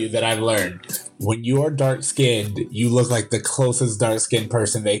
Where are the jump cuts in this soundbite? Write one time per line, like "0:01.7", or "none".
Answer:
none